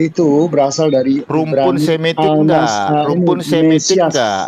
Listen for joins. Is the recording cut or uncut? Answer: uncut